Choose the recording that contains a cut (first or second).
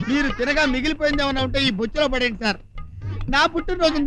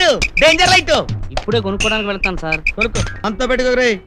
second